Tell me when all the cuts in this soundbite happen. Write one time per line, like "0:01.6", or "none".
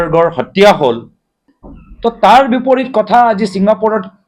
none

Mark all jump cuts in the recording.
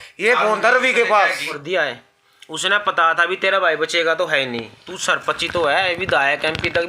0:01.6

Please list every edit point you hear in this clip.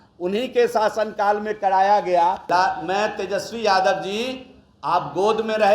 0:02.4

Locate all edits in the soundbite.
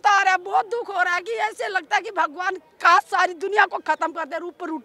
none

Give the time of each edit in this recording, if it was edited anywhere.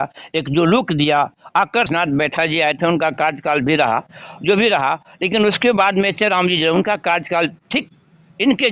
0:01.9

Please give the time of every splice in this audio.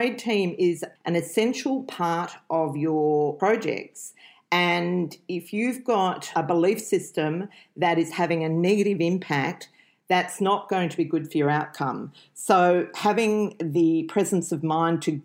0:00.9
0:03.4

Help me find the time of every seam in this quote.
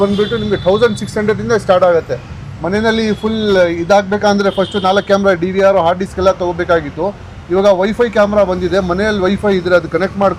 none

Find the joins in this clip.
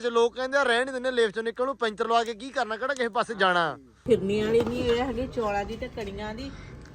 0:04.0

